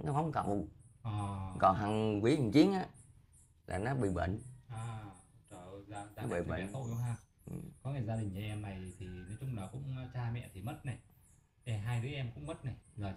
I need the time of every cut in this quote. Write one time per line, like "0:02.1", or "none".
none